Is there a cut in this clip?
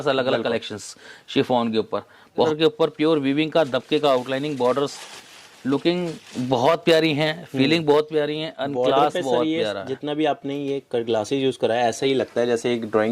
yes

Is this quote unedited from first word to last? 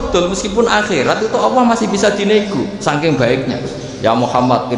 no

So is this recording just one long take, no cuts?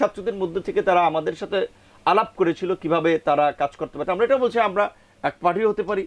no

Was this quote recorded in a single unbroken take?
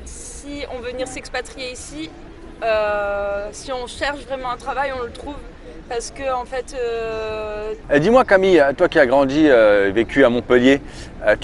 no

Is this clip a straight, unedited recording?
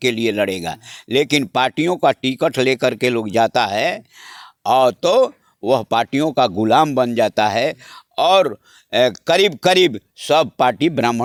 yes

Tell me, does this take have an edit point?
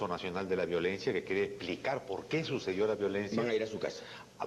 no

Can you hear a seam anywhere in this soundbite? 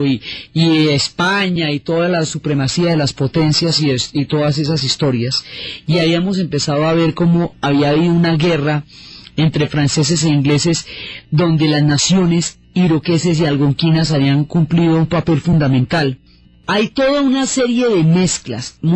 no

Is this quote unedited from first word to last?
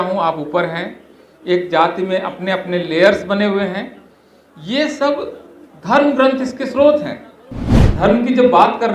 no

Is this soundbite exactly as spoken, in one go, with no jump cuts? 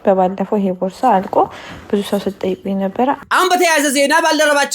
no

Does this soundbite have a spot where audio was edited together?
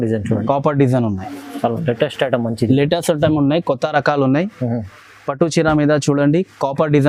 no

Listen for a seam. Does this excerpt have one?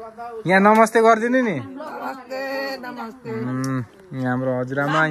no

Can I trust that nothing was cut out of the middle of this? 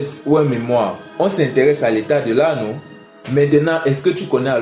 no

